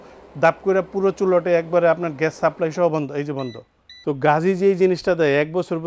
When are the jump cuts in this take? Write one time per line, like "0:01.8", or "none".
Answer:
0:04.0